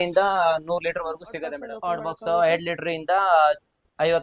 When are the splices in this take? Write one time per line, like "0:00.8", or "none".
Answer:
0:01.7